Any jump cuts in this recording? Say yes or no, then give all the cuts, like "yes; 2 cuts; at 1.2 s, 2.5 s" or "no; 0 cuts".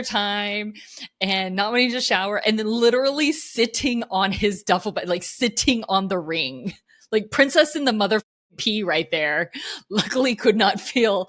no; 0 cuts